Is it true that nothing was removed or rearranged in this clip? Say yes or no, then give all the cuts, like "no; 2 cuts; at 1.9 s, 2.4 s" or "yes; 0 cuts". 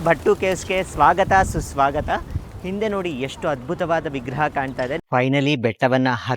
no; 1 cut; at 5.0 s